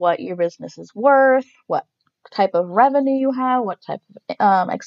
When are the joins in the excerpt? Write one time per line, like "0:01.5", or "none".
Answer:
none